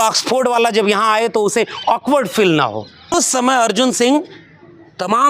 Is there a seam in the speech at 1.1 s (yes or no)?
no